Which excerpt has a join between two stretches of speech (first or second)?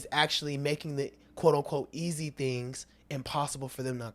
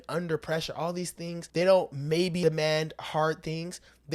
second